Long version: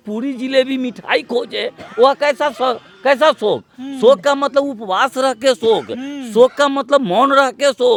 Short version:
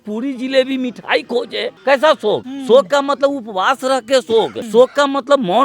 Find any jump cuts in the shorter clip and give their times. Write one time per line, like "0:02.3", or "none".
0:01.7
0:02.5
0:04.6